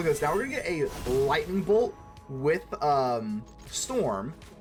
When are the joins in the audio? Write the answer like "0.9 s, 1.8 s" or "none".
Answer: none